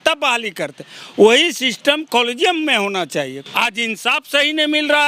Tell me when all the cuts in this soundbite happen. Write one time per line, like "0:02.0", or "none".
0:03.4